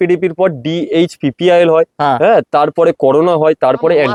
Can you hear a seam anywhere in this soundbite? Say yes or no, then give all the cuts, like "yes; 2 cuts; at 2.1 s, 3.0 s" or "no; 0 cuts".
no; 0 cuts